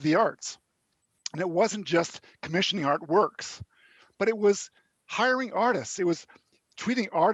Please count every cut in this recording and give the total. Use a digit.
0